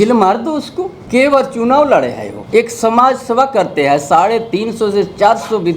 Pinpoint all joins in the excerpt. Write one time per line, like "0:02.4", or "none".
0:01.0
0:02.3